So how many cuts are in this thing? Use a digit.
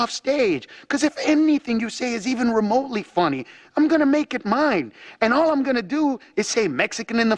0